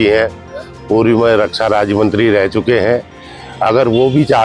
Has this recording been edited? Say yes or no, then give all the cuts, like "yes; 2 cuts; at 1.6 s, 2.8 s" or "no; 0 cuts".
no; 0 cuts